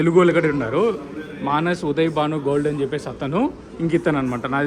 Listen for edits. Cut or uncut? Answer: uncut